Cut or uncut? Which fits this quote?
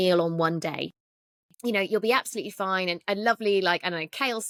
uncut